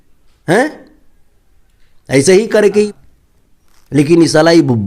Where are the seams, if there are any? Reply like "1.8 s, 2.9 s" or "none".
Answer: 2.9 s